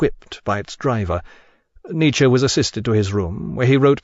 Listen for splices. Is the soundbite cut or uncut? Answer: cut